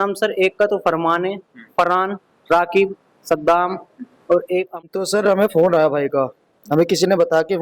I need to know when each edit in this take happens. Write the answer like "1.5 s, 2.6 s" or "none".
4.9 s